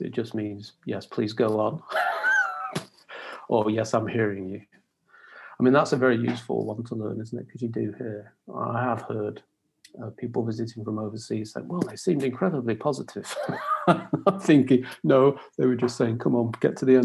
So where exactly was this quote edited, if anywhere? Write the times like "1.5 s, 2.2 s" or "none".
none